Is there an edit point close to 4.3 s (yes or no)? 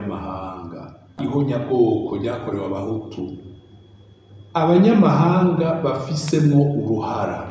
no